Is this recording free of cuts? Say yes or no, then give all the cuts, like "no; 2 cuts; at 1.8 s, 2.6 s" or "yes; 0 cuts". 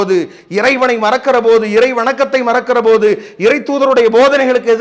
yes; 0 cuts